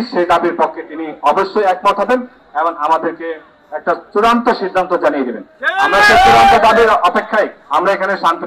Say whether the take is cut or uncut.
uncut